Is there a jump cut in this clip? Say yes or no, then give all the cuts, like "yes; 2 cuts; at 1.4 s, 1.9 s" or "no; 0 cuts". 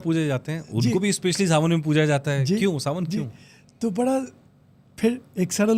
no; 0 cuts